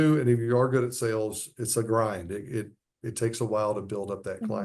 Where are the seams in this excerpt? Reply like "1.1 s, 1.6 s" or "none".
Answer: none